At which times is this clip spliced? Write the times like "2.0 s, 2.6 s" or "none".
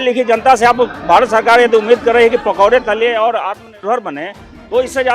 none